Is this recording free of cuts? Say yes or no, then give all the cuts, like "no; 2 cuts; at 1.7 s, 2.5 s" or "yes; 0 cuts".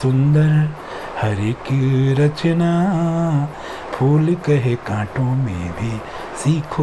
yes; 0 cuts